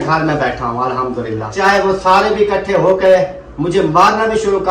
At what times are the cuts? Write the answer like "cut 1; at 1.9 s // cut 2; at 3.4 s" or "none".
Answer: cut 1; at 1.5 s